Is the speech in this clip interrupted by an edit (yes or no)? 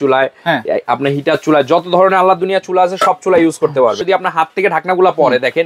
yes